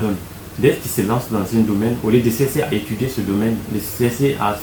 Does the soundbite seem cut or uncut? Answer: uncut